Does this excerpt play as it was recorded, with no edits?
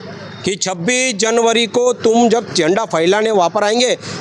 yes; 0 cuts

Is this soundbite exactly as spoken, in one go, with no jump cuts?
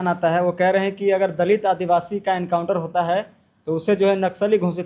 yes; 0 cuts

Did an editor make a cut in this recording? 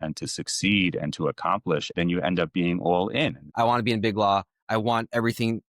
yes; 2 cuts; at 1.9 s, 3.4 s

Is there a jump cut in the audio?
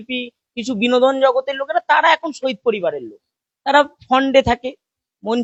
no; 0 cuts

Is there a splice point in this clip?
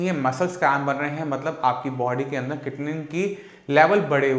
no; 0 cuts

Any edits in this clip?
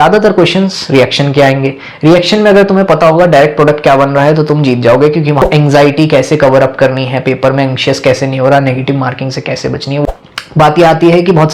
yes; 2 cuts; at 5.4 s, 10.0 s

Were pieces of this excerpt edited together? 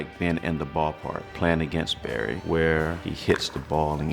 yes; 2 cuts; at 1.2 s, 2.4 s

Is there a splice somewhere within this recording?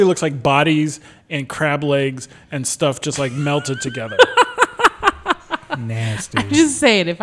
no; 0 cuts

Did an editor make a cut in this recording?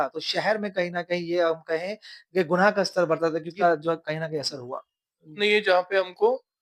yes; 2 cuts; at 3.5 s, 5.3 s

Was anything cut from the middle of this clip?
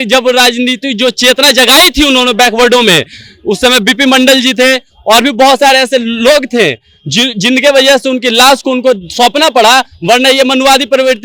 no; 0 cuts

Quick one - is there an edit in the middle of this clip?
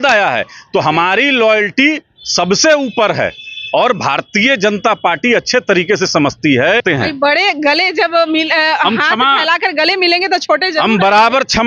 yes; 1 cut; at 6.8 s

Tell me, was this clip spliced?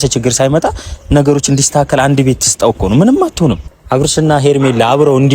yes; 1 cut; at 4.1 s

